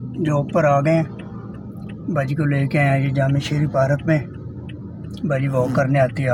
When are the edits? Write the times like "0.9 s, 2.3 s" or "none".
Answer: none